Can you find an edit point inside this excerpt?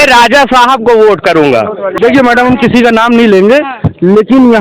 yes; 1 cut; at 1.9 s

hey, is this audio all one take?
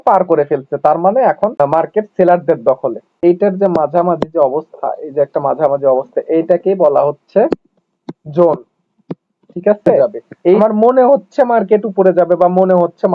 no; 3 cuts; at 1.6 s, 3.1 s, 10.6 s

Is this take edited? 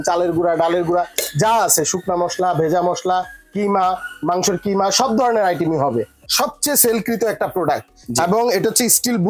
yes; 1 cut; at 6.2 s

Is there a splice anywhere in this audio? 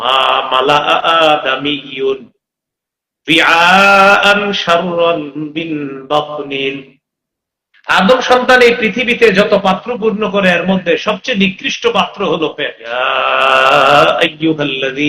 yes; 1 cut; at 12.8 s

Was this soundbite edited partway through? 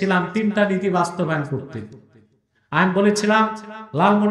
no; 0 cuts

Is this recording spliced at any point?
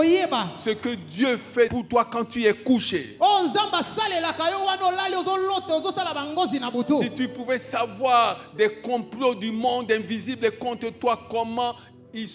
no; 0 cuts

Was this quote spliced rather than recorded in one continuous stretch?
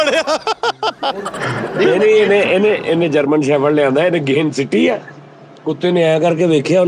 yes; 1 cut; at 1.3 s

